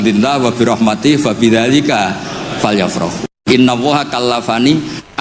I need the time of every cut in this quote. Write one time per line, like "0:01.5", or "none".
0:03.4